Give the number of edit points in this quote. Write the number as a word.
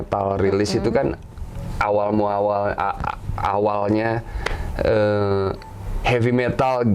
zero